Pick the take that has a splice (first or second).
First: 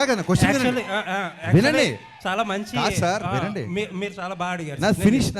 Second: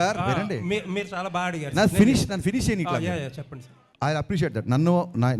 second